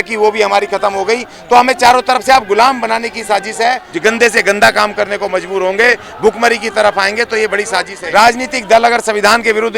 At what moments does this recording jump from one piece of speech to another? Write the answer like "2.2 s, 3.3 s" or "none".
3.9 s, 8.0 s